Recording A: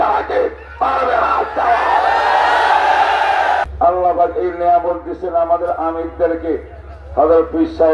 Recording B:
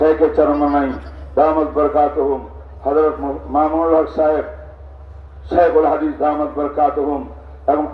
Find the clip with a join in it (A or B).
A